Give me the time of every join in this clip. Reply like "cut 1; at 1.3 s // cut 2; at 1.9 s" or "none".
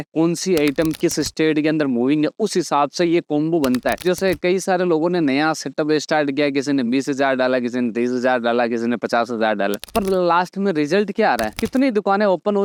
none